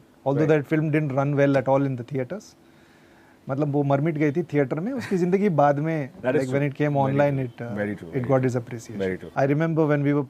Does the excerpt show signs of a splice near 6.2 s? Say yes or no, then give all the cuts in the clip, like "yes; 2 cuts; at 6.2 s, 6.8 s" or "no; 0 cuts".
no; 1 cut; at 9.2 s